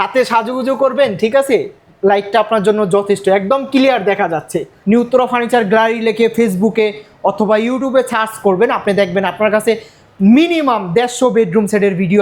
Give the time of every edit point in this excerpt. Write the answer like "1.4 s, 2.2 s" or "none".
4.6 s